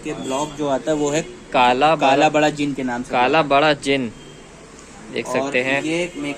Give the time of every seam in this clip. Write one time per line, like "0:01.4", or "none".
none